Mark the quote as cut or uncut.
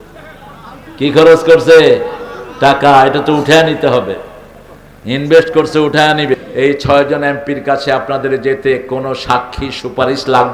cut